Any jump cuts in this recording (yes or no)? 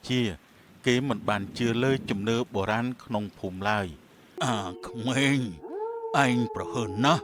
yes